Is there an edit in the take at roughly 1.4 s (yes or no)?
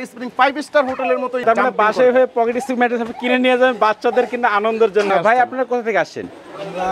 yes